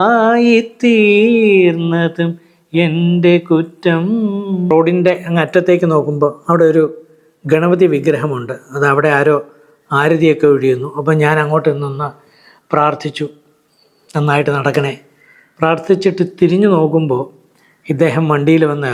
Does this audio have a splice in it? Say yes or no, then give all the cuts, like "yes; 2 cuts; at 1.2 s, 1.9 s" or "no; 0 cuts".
yes; 1 cut; at 4.7 s